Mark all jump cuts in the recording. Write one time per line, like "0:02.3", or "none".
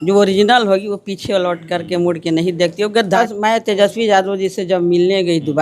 0:03.2